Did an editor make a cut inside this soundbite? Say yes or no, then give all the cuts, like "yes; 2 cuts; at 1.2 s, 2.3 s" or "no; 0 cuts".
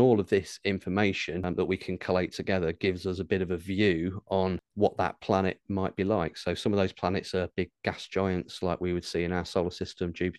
yes; 2 cuts; at 1.4 s, 4.6 s